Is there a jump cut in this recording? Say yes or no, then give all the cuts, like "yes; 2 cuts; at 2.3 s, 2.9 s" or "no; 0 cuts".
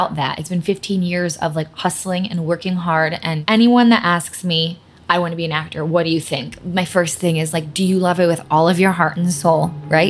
yes; 1 cut; at 3.3 s